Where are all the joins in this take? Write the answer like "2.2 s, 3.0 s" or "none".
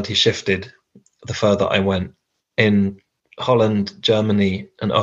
none